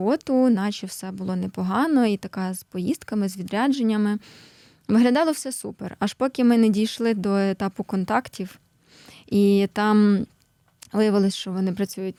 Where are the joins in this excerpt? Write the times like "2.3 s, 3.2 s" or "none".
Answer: none